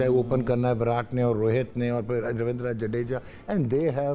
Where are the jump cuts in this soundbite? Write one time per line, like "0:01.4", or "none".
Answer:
none